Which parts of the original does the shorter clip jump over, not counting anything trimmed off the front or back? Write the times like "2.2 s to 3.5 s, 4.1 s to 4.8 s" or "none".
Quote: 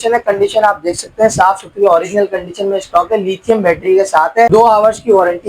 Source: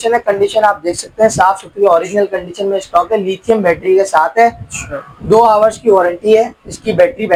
4.5 s to 5.3 s